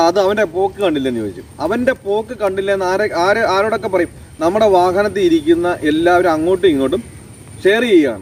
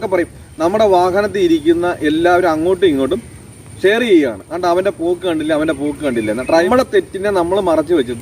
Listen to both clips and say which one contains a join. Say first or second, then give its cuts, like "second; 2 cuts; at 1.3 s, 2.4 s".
second; 1 cut; at 6.7 s